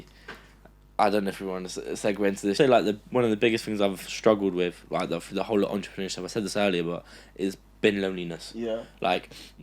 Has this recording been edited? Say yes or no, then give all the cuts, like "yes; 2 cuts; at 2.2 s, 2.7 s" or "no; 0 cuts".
yes; 1 cut; at 2.5 s